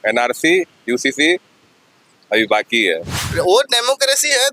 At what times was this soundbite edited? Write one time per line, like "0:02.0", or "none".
0:03.2